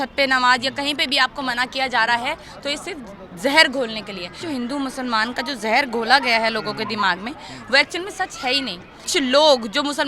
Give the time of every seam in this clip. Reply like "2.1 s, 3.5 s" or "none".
4.3 s, 9.1 s

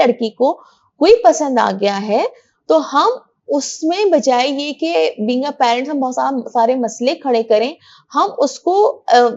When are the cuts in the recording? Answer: none

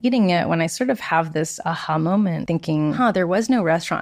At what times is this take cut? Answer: 2.7 s

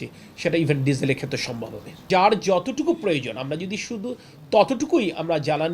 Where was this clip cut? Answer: 2.0 s

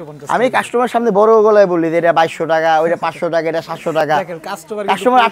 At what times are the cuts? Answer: none

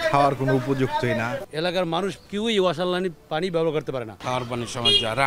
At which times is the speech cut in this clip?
1.5 s, 4.2 s

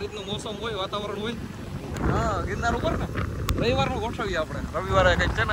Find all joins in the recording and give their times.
none

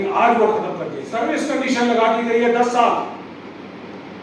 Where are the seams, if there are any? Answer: 1.0 s

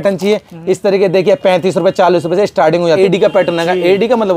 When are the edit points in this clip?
3.0 s

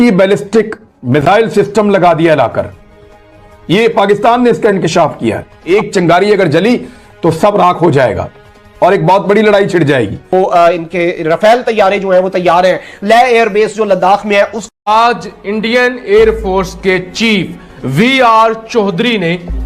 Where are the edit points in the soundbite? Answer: 5.5 s, 10.2 s, 14.9 s

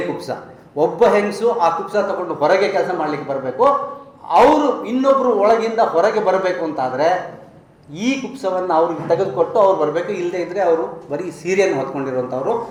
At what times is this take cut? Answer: none

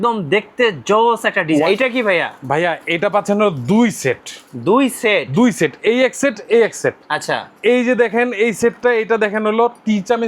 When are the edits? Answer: 1.7 s

